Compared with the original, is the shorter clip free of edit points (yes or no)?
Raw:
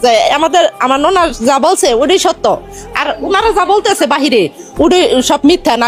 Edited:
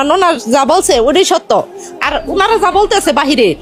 yes